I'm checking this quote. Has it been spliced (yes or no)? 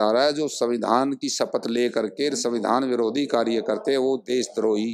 no